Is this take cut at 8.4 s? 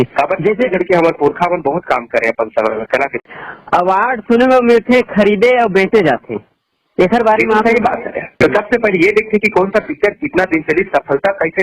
yes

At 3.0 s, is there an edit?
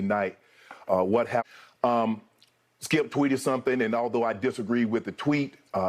no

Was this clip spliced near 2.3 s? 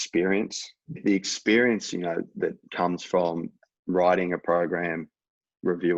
no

